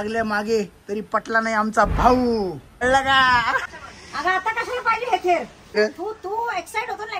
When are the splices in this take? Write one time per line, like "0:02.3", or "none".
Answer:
0:02.8
0:03.8
0:05.8